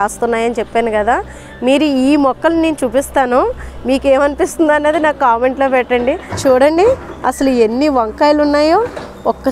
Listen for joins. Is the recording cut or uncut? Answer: cut